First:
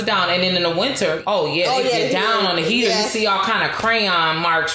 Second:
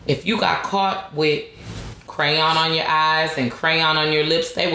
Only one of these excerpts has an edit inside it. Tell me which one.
first; 1 cut; at 1.2 s

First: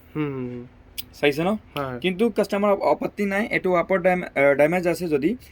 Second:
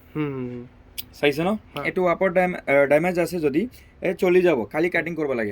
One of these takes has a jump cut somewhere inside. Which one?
second; 1 cut; at 2.1 s

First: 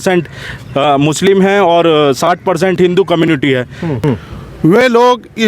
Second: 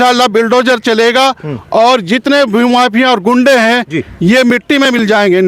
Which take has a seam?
first; 1 cut; at 4.0 s

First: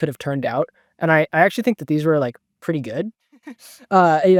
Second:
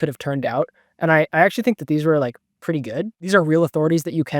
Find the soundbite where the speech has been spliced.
second; 1 cut; at 3.2 s

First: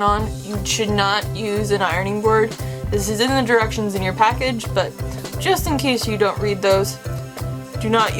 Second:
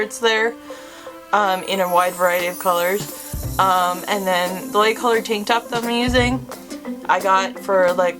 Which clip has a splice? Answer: second; 1 cut; at 4.6 s

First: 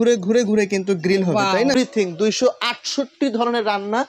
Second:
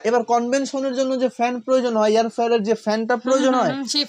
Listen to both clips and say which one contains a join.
first; 1 cut; at 1.7 s

